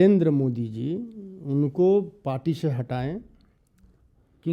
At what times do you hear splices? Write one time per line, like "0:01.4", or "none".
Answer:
none